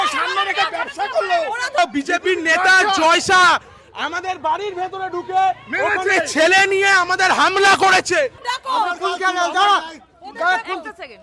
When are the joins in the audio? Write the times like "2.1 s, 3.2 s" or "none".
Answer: 1.8 s, 8.5 s